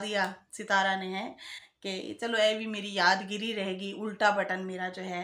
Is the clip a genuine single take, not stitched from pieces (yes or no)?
yes